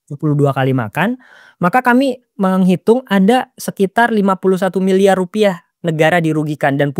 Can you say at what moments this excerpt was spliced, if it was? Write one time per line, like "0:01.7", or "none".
none